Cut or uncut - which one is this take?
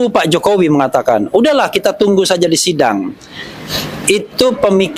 uncut